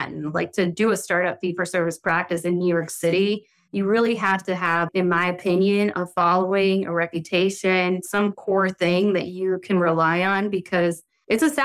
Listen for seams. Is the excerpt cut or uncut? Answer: cut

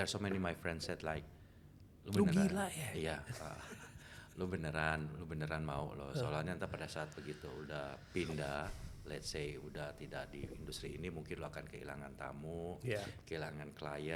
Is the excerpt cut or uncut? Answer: uncut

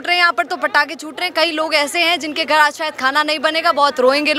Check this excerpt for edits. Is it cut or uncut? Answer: uncut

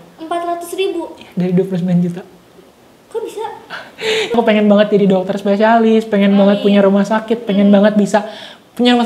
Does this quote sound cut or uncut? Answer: cut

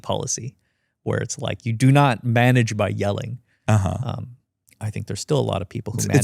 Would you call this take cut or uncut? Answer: cut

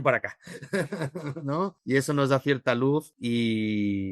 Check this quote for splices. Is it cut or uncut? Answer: cut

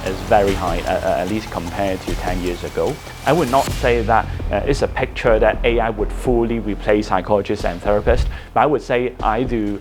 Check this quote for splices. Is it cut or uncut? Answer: cut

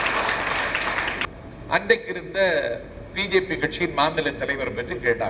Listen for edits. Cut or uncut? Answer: cut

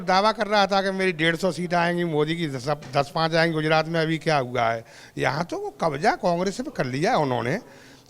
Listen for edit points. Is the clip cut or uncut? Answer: uncut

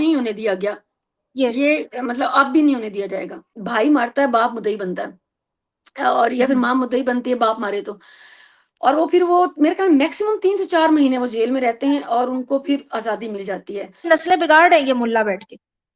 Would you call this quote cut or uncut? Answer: cut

